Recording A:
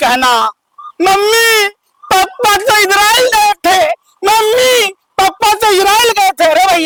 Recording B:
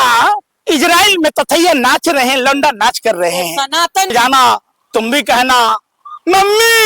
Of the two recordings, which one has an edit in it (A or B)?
B